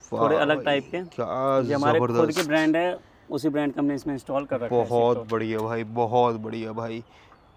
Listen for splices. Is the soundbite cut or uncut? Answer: uncut